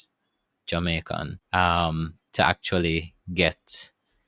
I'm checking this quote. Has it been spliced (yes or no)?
no